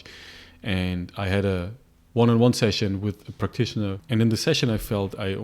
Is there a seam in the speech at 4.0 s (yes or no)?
yes